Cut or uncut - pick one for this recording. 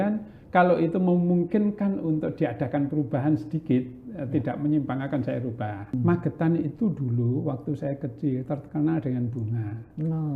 cut